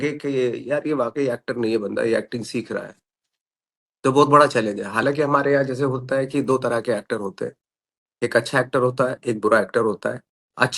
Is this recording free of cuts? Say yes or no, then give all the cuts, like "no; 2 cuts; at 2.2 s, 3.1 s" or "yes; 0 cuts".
yes; 0 cuts